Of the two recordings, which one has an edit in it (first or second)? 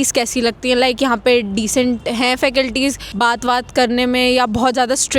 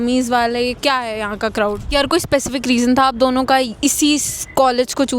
second